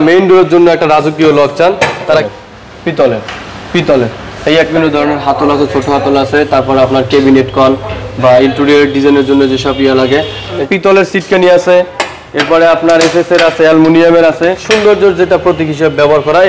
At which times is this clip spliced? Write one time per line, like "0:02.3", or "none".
0:02.2
0:04.7
0:10.6
0:14.6